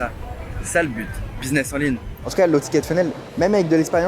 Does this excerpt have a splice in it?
yes; 1 cut; at 2.2 s

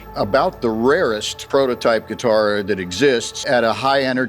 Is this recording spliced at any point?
yes; 2 cuts; at 1.3 s, 3.3 s

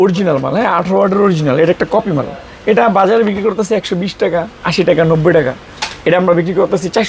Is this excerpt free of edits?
yes; 0 cuts

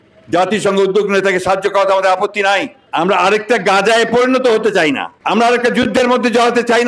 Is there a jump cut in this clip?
yes; 2 cuts; at 2.8 s, 5.1 s

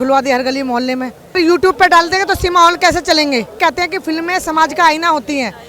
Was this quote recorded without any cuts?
no; 2 cuts; at 1.4 s, 3.5 s

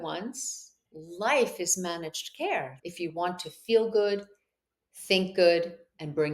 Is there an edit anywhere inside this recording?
yes; 2 cuts; at 0.9 s, 2.7 s

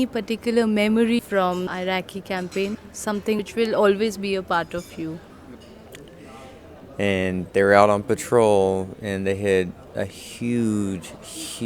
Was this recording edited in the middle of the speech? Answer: yes; 3 cuts; at 1.2 s, 2.8 s, 5.5 s

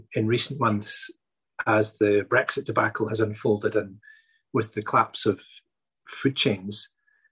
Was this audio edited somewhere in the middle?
no; 0 cuts

